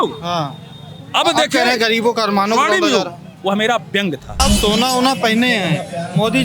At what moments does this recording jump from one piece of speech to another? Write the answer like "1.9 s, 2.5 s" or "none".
4.4 s